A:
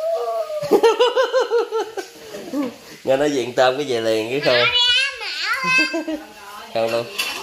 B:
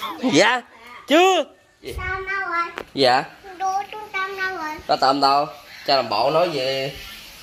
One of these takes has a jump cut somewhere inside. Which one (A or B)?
B